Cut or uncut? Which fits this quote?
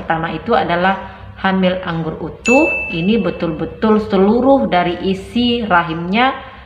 uncut